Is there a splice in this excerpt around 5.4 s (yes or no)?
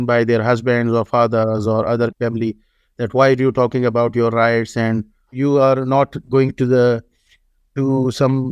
yes